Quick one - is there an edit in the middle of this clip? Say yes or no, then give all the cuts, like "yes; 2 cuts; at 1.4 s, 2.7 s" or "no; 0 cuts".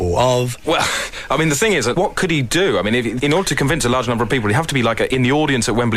no; 0 cuts